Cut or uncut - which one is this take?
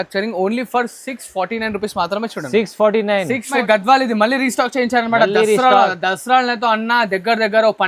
cut